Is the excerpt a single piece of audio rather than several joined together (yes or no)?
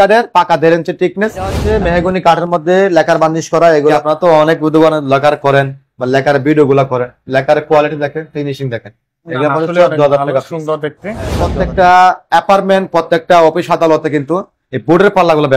no